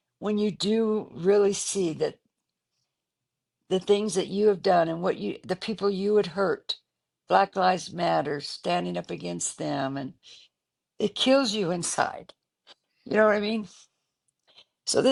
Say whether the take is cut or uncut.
uncut